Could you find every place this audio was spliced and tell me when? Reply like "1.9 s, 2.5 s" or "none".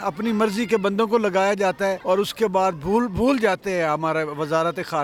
none

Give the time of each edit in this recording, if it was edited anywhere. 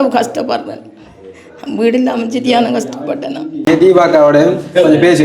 3.7 s

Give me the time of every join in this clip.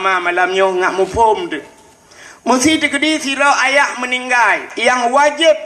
4.7 s

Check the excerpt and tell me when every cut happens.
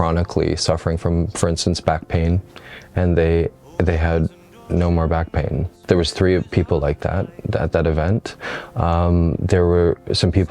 5.8 s

